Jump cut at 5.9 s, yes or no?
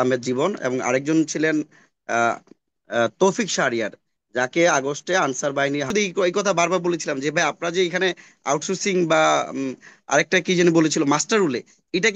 yes